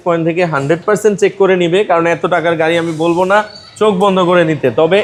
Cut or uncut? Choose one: uncut